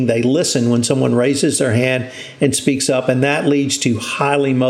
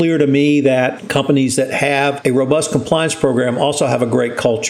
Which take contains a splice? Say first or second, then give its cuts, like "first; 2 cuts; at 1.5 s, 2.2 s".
second; 2 cuts; at 1.0 s, 2.2 s